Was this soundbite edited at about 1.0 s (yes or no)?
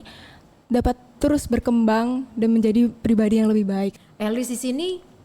no